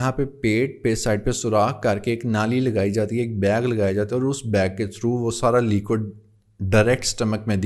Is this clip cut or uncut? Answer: uncut